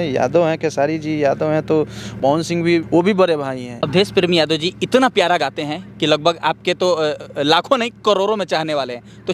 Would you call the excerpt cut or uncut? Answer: cut